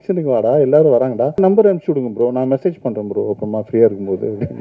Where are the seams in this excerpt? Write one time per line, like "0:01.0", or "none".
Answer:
0:01.4